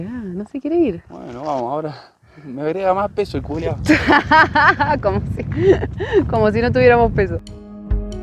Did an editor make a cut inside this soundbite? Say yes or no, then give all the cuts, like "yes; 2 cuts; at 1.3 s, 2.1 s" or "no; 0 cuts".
no; 0 cuts